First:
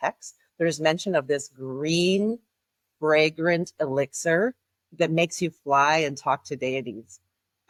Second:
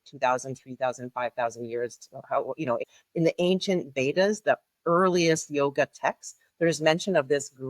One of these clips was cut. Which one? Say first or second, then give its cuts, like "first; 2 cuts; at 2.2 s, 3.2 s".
second; 1 cut; at 2.8 s